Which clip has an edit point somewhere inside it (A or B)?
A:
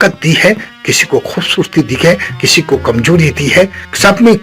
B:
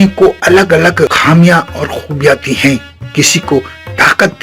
B